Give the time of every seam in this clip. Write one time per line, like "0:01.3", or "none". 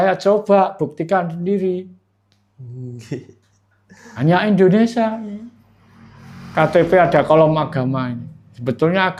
none